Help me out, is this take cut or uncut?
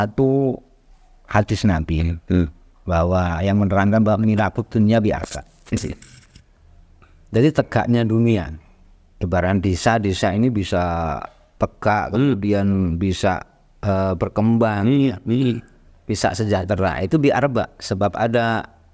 uncut